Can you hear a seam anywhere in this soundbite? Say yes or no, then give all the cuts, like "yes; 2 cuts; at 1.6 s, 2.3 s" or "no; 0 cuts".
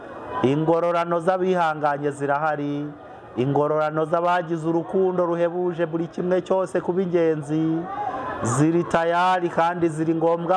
no; 0 cuts